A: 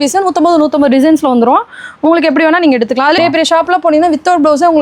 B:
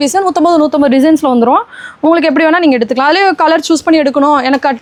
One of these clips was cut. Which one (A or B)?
A